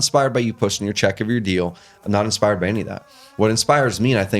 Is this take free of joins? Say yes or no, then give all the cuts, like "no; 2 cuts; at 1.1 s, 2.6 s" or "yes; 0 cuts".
yes; 0 cuts